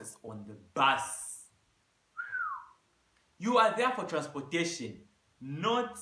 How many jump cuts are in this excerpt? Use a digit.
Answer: 0